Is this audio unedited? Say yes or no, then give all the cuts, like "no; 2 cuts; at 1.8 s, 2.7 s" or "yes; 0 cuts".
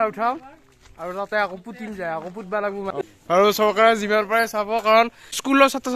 no; 1 cut; at 2.7 s